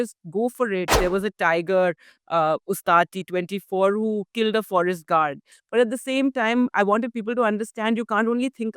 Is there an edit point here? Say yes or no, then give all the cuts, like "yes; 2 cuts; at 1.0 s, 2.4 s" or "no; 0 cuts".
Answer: yes; 2 cuts; at 0.9 s, 5.5 s